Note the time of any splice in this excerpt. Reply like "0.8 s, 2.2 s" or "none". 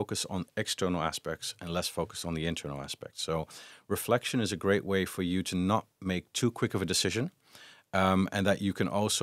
none